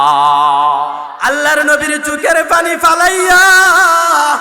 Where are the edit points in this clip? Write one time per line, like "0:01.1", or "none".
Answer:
0:01.1

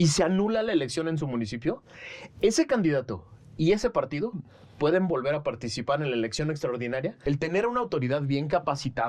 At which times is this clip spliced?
0:07.2

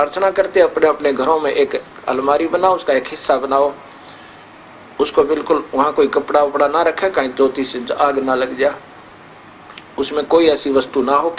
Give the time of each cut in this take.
none

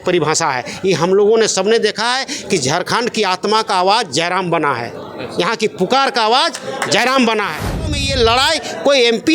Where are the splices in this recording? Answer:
0:07.9

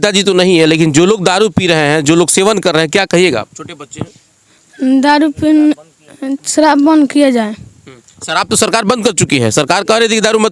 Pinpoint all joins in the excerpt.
none

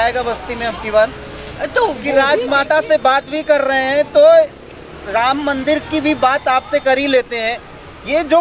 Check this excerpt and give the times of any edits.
0:02.1

